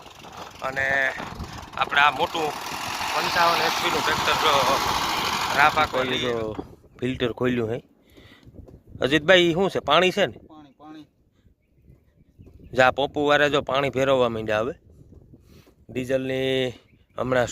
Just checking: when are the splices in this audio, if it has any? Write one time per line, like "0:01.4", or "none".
0:06.0